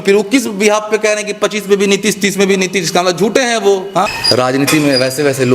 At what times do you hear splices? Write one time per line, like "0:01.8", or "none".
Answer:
0:04.1